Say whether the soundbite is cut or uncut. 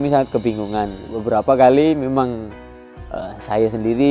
cut